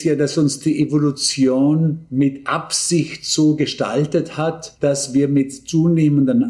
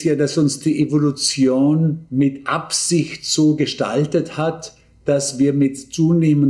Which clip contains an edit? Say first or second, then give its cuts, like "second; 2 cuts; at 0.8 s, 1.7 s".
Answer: first; 1 cut; at 4.7 s